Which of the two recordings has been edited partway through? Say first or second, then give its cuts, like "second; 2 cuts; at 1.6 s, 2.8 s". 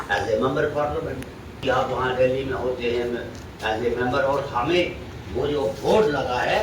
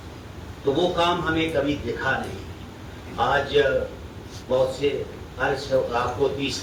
first; 1 cut; at 1.6 s